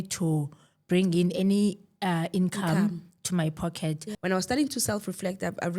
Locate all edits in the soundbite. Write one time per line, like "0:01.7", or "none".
0:04.1